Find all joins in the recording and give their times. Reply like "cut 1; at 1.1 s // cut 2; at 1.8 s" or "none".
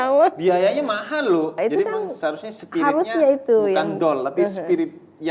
cut 1; at 1.6 s